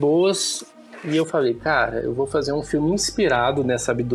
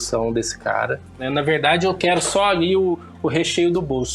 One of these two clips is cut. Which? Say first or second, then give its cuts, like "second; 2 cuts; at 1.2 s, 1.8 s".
second; 1 cut; at 1.2 s